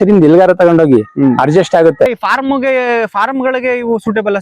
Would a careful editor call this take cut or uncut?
cut